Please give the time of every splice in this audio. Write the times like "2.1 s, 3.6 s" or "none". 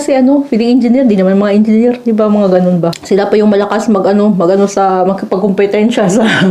3.0 s